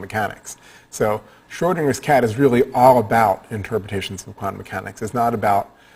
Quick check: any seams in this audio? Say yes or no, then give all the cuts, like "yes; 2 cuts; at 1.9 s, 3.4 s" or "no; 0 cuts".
no; 0 cuts